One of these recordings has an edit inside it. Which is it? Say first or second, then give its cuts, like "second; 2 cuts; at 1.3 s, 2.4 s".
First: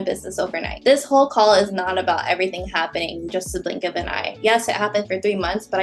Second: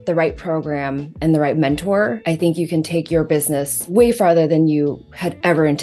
second; 2 cuts; at 2.2 s, 3.9 s